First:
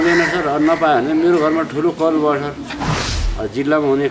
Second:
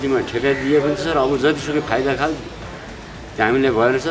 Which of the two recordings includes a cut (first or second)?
first